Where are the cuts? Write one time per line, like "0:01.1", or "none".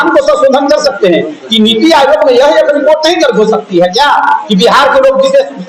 none